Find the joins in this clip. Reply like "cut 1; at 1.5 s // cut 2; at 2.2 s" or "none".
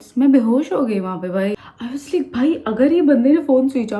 cut 1; at 1.6 s